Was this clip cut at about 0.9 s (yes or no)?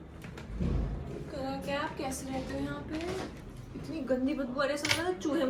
no